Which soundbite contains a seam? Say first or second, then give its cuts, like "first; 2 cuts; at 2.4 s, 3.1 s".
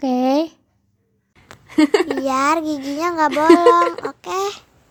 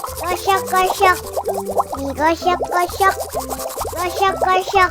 second; 1 cut; at 3.4 s